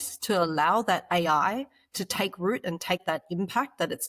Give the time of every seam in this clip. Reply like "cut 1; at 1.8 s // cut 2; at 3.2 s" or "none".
cut 1; at 3.0 s